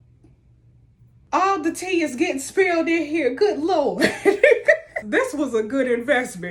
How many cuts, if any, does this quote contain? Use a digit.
2